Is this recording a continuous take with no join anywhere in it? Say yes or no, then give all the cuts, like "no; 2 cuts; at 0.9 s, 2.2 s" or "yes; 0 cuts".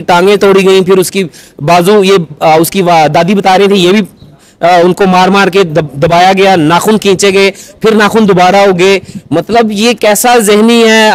yes; 0 cuts